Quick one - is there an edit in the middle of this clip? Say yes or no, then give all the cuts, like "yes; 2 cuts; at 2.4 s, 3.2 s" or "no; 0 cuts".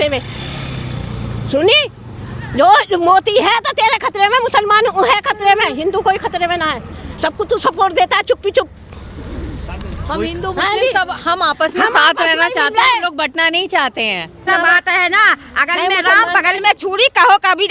yes; 1 cut; at 14.5 s